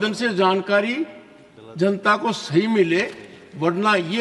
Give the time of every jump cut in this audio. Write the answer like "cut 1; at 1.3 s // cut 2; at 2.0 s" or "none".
none